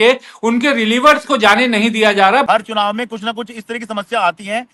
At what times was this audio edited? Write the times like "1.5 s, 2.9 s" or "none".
2.4 s